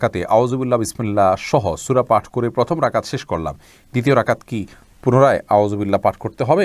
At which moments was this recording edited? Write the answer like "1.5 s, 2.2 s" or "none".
none